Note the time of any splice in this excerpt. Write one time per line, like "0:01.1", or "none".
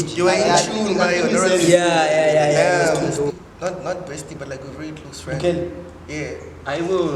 0:03.3